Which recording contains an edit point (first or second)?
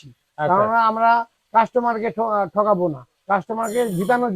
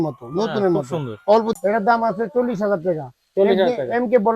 second